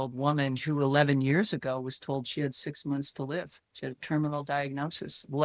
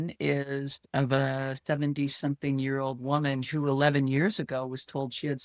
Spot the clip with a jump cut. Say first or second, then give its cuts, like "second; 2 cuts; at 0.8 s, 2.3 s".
first; 1 cut; at 3.6 s